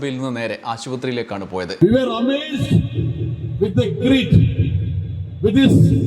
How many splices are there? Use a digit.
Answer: 1